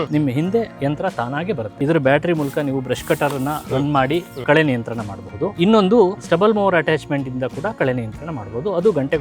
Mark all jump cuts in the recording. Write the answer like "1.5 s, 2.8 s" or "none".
1.7 s, 5.5 s, 6.2 s